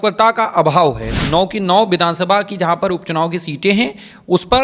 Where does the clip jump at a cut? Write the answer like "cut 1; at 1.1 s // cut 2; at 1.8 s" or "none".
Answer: cut 1; at 1.1 s